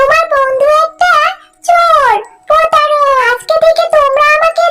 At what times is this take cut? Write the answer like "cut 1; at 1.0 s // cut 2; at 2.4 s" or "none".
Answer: cut 1; at 3.2 s